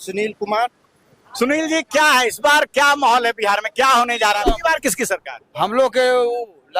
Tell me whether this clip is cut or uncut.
cut